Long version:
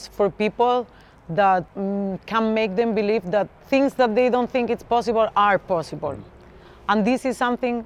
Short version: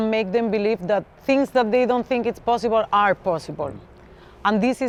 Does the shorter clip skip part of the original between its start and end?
no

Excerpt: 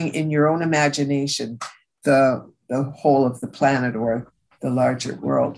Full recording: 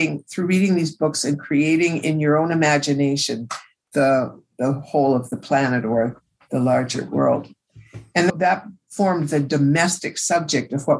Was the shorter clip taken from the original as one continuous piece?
yes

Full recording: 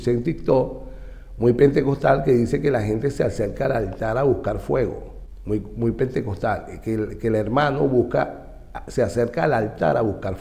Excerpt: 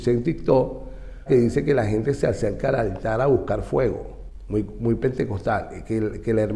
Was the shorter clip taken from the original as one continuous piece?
no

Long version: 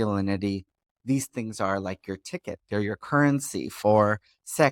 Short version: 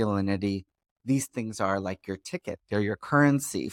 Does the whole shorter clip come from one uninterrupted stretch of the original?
yes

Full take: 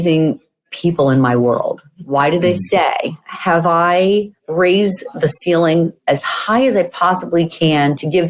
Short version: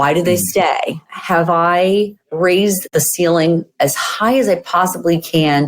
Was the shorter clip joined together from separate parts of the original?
yes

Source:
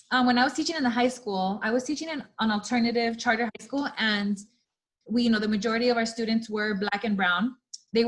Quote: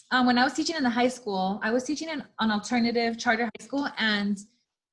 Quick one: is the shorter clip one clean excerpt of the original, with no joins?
yes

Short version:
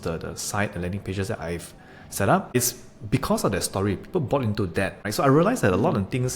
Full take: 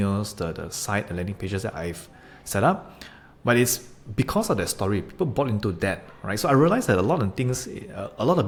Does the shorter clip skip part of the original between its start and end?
yes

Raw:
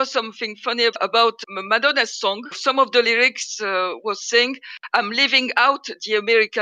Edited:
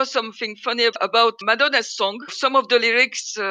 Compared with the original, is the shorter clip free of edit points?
no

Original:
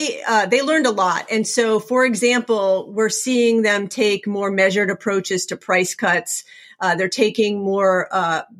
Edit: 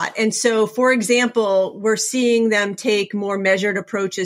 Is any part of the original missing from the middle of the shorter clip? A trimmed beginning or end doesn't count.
no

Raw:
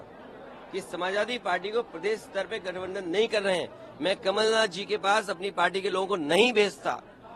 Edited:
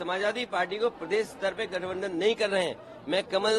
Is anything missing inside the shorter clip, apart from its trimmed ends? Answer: no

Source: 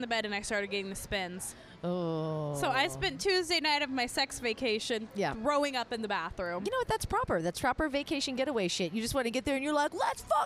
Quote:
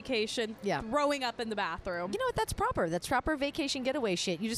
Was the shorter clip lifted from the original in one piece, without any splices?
yes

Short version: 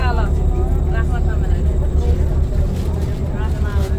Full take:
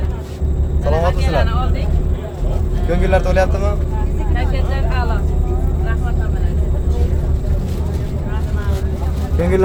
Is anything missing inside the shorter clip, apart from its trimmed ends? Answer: no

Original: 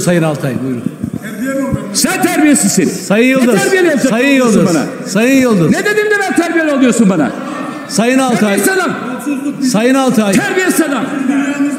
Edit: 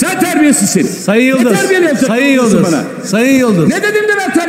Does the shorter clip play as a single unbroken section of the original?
yes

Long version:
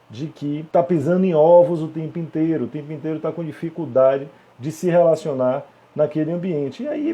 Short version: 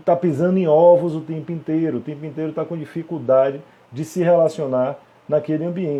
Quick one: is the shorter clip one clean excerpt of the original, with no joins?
yes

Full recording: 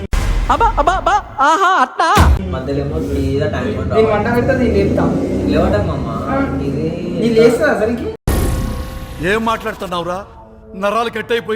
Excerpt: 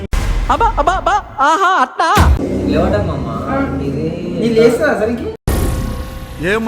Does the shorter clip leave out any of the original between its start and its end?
yes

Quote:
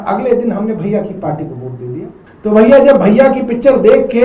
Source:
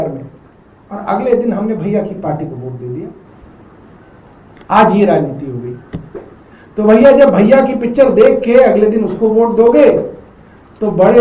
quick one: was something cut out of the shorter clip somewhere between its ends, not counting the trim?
yes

